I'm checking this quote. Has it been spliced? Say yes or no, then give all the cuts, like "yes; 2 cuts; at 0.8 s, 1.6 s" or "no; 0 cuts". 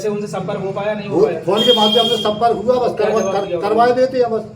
no; 0 cuts